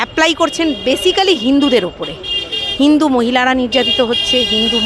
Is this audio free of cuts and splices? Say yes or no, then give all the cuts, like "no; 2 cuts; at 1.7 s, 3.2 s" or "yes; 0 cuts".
yes; 0 cuts